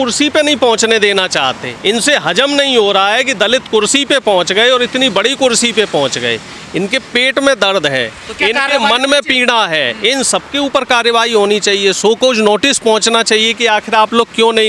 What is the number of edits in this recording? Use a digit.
0